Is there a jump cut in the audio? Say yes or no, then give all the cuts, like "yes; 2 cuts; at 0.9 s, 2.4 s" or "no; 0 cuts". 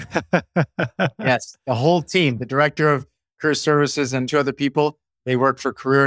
yes; 1 cut; at 4.3 s